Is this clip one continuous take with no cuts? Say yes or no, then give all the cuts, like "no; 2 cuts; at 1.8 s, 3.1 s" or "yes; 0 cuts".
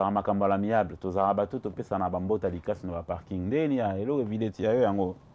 yes; 0 cuts